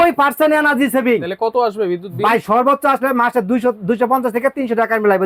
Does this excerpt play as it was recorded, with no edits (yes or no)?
yes